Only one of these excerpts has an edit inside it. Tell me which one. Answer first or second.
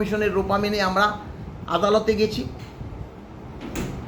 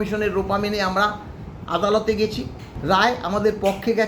second